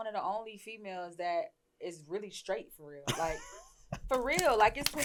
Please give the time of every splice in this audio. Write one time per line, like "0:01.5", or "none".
none